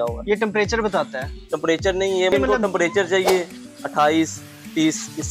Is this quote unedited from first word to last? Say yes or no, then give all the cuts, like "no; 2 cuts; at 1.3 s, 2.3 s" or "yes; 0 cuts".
no; 1 cut; at 2.3 s